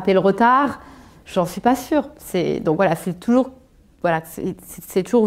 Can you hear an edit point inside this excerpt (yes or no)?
no